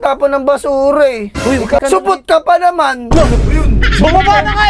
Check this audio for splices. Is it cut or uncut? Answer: cut